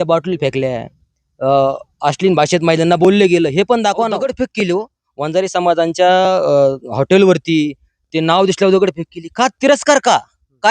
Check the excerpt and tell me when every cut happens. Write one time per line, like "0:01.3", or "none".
0:04.3